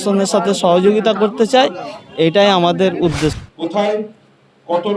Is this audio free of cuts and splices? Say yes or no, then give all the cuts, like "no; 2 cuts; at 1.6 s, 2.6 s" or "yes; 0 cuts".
no; 1 cut; at 3.4 s